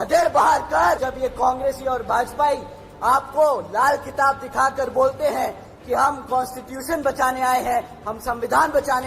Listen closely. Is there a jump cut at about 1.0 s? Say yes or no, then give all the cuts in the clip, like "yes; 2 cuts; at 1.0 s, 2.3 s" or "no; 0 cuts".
yes; 1 cut; at 1.0 s